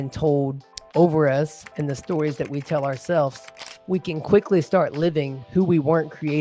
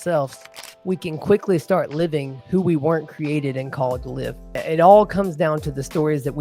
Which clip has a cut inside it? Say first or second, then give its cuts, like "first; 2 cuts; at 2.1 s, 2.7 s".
second; 1 cut; at 4.6 s